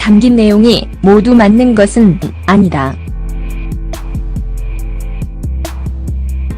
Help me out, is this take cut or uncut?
cut